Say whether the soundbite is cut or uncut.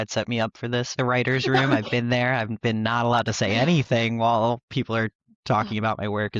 cut